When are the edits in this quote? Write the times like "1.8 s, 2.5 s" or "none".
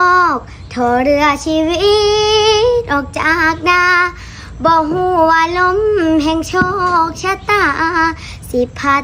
none